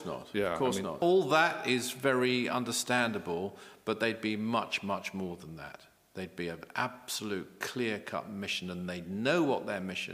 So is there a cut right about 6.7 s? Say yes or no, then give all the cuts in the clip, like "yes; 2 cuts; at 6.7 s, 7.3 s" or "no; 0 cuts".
no; 1 cut; at 1.0 s